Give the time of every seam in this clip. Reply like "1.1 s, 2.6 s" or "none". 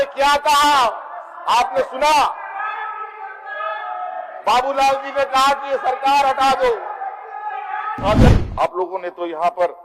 8.3 s